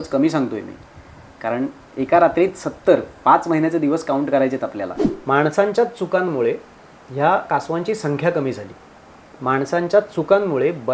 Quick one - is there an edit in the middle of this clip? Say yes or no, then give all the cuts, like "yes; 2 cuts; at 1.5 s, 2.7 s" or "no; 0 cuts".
yes; 1 cut; at 5.0 s